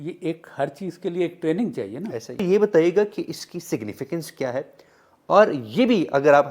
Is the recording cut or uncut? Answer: cut